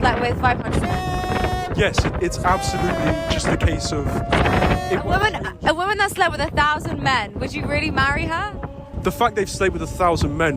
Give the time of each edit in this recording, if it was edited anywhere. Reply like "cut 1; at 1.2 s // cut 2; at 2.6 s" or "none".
cut 1; at 6.1 s